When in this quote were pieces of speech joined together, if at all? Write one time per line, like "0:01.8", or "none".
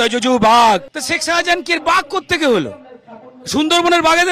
0:01.0